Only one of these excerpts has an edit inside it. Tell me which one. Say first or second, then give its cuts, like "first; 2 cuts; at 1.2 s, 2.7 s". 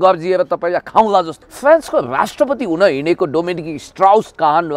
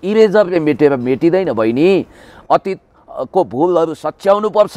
first; 1 cut; at 1.4 s